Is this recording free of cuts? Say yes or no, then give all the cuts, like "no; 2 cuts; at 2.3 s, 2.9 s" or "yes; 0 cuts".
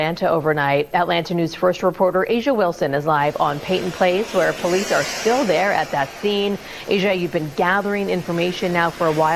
yes; 0 cuts